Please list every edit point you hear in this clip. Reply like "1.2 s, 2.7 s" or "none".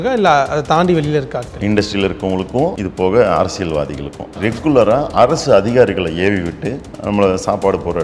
2.8 s, 4.4 s